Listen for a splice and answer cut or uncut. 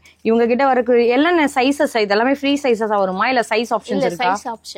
uncut